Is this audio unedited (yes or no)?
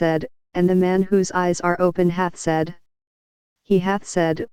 yes